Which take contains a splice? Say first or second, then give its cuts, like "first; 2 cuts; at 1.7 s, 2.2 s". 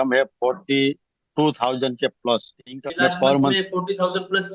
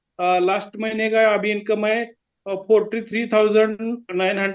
first; 1 cut; at 3.5 s